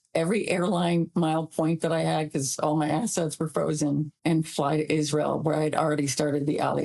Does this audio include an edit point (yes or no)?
yes